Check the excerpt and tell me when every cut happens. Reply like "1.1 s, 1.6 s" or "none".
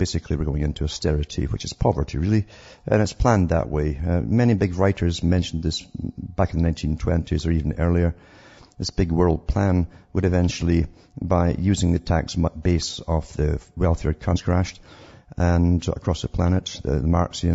none